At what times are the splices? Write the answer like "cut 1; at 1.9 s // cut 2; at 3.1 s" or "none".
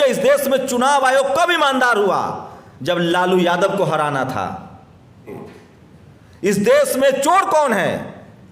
cut 1; at 5.4 s